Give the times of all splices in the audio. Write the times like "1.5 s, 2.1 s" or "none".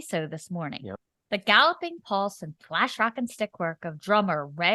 1.1 s